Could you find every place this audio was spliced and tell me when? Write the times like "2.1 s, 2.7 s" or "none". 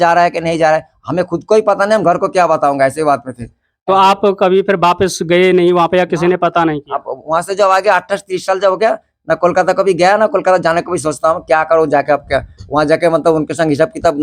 none